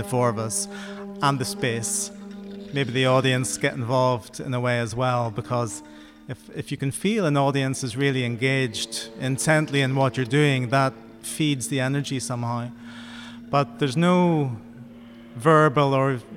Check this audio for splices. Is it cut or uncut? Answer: uncut